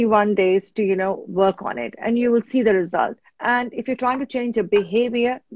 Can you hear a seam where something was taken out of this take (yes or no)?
yes